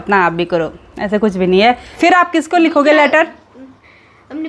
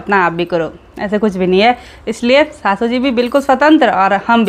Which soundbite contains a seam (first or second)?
first